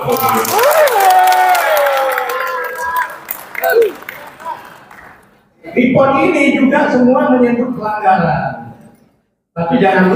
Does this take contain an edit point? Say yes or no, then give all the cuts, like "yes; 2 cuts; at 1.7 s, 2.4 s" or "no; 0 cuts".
no; 0 cuts